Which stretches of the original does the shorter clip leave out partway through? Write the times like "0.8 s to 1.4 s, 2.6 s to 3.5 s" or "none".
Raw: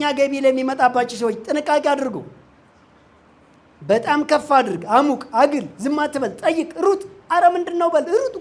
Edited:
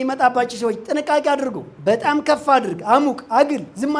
2.3 s to 3.7 s